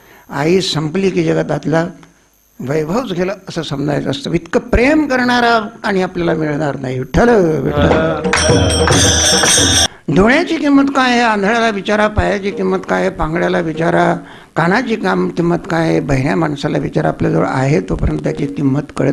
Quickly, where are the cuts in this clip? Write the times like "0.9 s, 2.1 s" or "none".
9.8 s